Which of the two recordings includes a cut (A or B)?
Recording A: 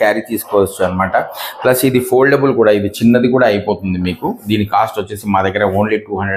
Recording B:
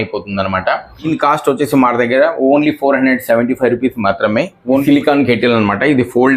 B